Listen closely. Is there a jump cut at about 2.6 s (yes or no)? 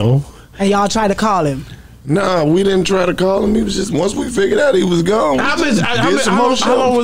no